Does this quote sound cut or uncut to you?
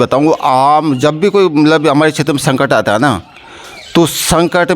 uncut